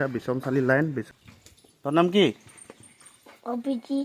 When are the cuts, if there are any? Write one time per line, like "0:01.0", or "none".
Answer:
0:01.0